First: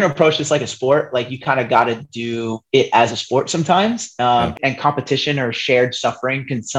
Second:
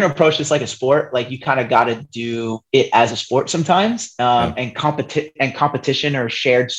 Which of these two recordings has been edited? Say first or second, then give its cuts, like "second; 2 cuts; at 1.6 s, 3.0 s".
first; 1 cut; at 4.5 s